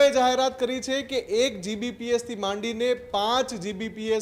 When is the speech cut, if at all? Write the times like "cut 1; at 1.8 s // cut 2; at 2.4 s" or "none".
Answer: none